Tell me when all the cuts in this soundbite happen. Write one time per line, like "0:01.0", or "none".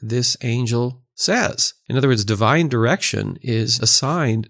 0:01.7
0:03.7

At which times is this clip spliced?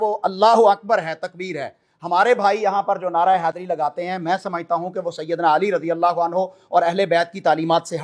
none

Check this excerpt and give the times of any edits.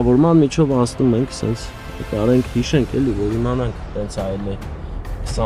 none

